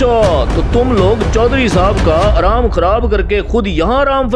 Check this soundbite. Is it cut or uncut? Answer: uncut